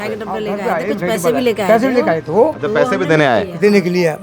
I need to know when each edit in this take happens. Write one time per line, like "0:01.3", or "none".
none